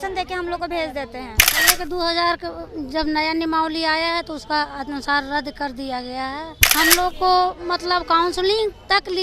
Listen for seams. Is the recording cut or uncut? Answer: cut